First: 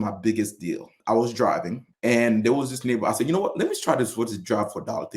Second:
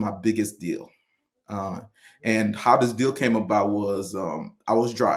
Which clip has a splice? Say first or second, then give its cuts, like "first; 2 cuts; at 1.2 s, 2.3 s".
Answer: first; 2 cuts; at 0.9 s, 1.8 s